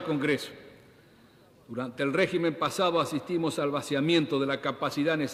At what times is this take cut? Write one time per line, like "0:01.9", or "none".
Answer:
none